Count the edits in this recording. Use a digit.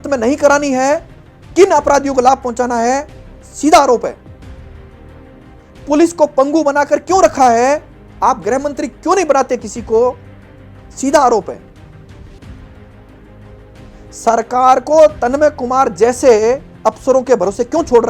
2